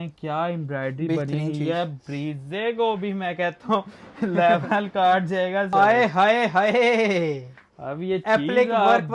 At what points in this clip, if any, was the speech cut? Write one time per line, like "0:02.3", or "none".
0:05.9

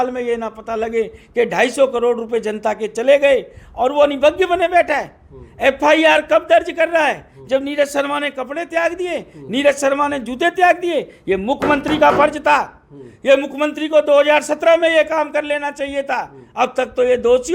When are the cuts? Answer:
none

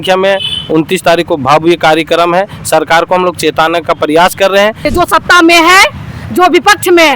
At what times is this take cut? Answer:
0:04.8

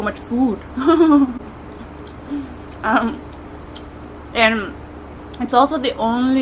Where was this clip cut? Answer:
none

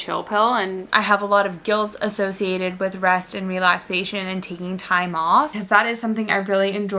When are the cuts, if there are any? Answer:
0:00.8
0:05.5

